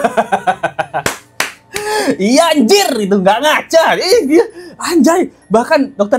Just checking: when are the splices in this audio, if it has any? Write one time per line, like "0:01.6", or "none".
none